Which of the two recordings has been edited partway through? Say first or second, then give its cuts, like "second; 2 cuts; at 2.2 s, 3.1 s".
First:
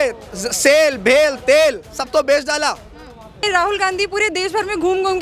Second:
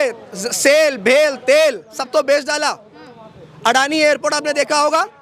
first; 1 cut; at 3.4 s